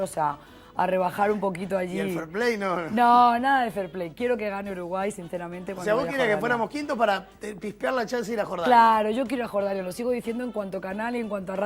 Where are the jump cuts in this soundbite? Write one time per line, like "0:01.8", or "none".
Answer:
none